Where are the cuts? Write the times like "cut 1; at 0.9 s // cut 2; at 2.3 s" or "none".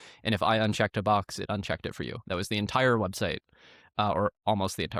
none